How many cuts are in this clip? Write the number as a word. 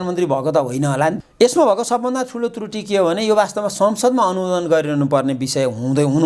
one